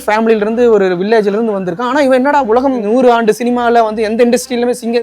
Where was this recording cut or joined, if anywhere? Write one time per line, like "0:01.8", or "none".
0:02.8